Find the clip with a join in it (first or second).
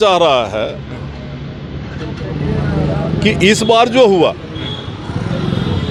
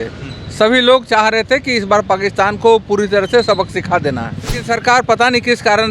second